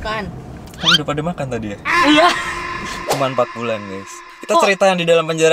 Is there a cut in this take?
yes; 1 cut; at 3.0 s

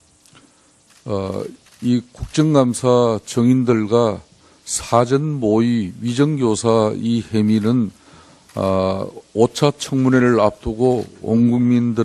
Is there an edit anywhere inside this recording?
no; 0 cuts

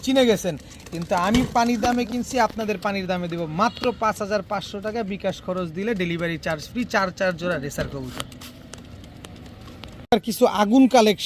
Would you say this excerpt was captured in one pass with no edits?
yes; 0 cuts

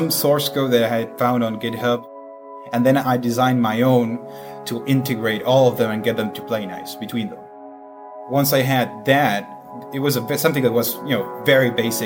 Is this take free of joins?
no; 2 cuts; at 2.1 s, 8.0 s

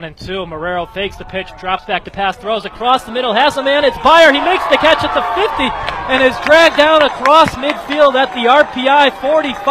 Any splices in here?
no; 0 cuts

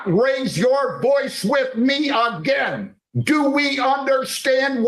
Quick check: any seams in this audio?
no; 0 cuts

